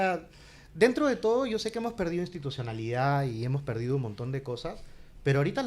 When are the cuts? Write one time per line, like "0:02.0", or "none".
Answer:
none